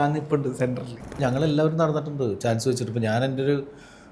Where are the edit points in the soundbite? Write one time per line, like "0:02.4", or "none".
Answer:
0:01.2